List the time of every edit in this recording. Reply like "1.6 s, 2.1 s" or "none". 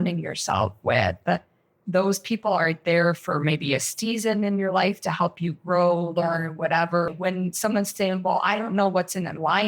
7.1 s